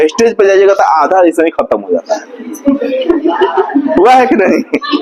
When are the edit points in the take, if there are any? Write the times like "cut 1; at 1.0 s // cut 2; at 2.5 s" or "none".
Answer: none